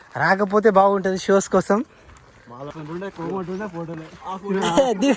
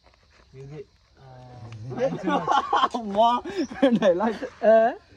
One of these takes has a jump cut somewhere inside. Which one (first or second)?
first